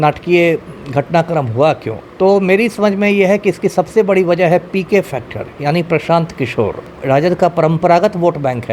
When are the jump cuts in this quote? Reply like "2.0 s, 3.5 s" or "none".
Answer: 2.0 s, 6.9 s